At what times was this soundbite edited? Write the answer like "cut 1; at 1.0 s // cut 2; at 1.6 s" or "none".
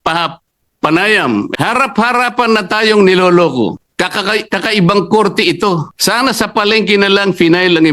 cut 1; at 1.5 s // cut 2; at 3.8 s // cut 3; at 5.9 s